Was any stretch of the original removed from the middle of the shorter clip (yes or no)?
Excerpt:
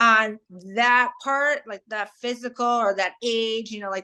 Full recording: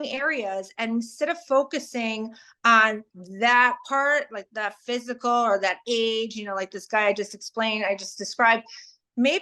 no